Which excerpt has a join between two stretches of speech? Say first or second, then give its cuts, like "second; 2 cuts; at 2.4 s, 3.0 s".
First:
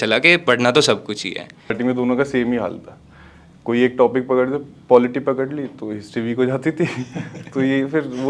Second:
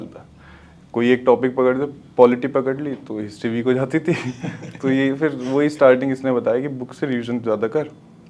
first; 1 cut; at 1.7 s